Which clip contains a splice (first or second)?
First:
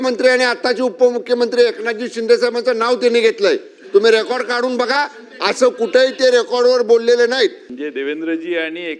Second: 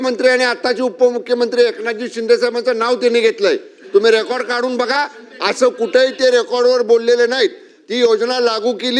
first